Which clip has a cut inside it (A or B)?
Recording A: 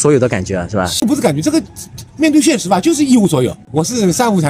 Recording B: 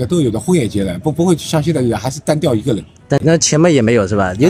A